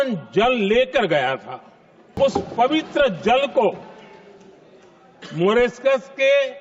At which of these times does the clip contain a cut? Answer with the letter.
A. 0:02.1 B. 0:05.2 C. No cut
A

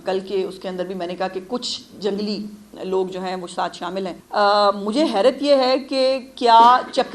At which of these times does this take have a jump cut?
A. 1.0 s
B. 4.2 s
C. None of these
B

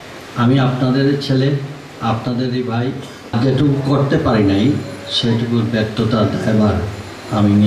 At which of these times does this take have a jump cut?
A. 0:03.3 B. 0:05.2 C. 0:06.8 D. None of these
A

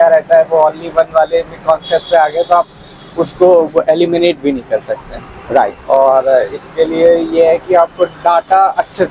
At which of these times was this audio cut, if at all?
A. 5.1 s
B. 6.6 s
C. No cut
C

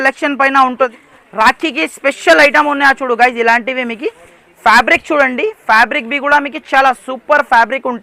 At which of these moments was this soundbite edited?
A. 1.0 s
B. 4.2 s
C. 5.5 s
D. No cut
A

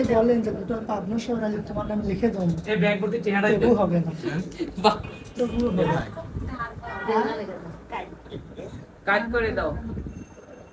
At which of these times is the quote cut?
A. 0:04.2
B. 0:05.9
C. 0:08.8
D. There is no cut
B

